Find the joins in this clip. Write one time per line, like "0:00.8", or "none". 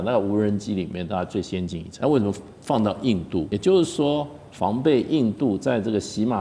0:01.8
0:03.5